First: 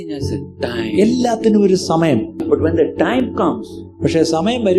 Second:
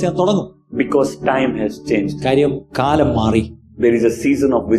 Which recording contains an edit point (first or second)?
first